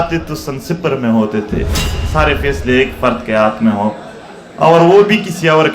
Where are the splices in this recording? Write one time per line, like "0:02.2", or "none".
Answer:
0:02.0